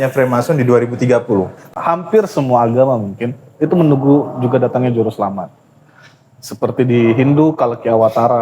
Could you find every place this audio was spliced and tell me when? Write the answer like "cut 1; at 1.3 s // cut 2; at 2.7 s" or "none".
cut 1; at 1.7 s